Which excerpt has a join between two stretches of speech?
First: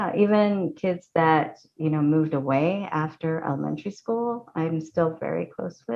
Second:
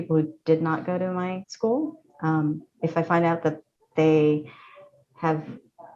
second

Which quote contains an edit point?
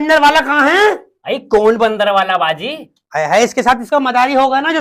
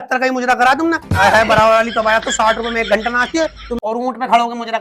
second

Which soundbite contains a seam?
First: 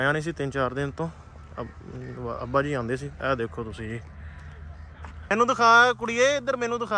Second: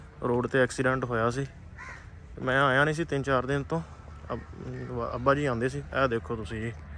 first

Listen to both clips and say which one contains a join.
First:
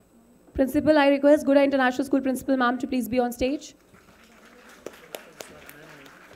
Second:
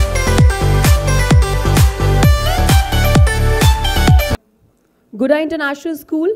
second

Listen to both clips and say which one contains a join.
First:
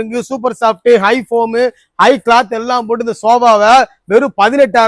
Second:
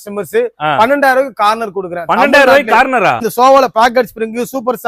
second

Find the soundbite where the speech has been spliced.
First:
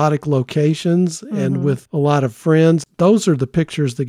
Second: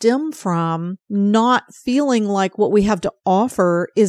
first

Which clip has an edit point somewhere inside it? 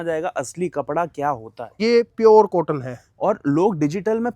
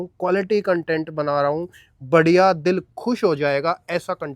first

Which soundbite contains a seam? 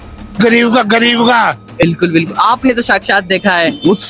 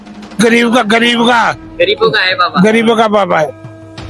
first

